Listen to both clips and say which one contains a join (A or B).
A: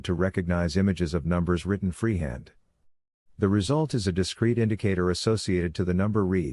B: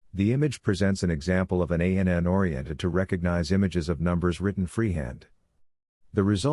A